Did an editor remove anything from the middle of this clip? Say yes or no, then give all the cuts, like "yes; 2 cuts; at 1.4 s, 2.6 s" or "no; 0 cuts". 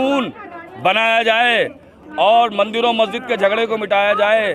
no; 0 cuts